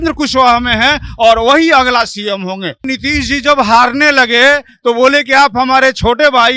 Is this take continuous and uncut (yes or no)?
no